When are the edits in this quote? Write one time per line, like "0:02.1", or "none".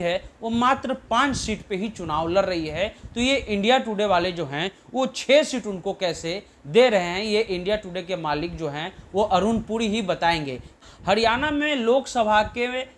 0:10.9